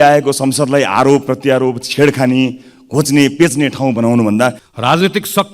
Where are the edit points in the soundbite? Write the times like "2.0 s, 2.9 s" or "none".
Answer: 4.6 s